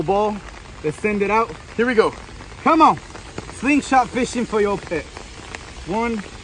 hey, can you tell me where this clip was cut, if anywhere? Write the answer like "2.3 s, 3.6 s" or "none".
none